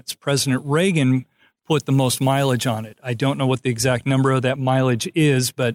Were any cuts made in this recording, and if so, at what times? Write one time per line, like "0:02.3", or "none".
0:04.6

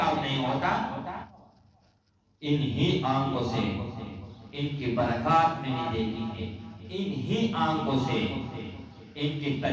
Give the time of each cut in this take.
0:01.2

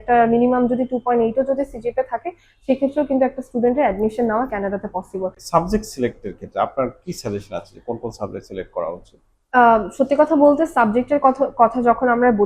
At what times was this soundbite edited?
0:05.4

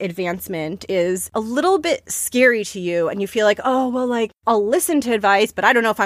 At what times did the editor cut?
0:00.9
0:04.3

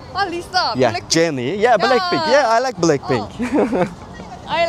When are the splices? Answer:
none

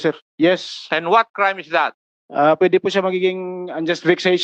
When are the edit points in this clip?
none

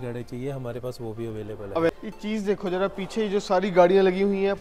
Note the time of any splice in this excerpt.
0:01.9

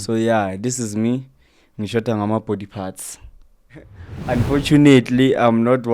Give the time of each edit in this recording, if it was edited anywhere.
0:04.0

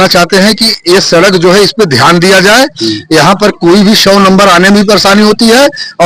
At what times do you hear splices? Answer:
none

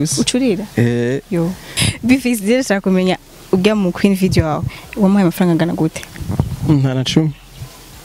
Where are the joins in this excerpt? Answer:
0:01.7

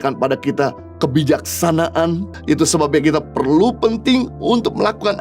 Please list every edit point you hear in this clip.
0:02.4

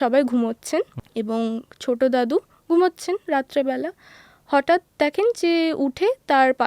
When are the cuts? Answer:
0:01.0

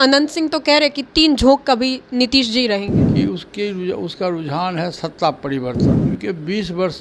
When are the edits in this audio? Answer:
0:03.0
0:06.0

